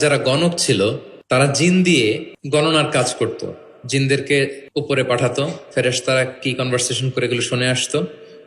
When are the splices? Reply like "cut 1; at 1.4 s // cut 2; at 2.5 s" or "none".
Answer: cut 1; at 1.1 s // cut 2; at 2.3 s // cut 3; at 4.6 s